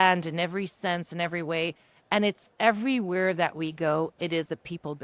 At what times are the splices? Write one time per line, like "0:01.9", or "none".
none